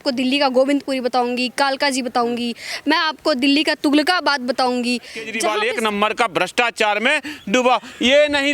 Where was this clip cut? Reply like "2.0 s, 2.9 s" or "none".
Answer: 5.3 s

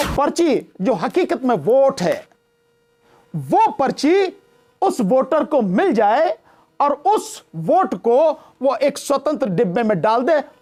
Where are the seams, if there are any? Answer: none

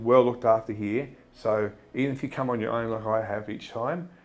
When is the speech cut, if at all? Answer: none

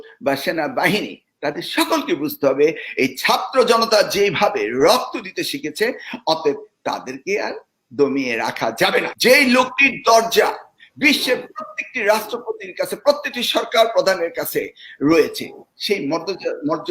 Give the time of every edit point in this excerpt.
9.1 s

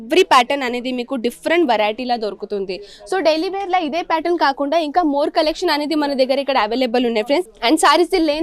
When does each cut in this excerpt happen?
7.5 s

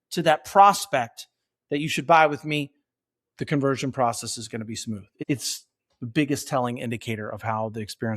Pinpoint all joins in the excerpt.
5.1 s

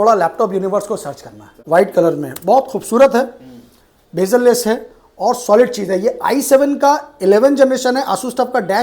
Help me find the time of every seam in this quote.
1.5 s

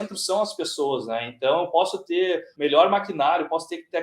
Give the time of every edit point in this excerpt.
2.5 s

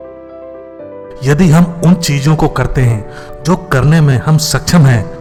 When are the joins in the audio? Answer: none

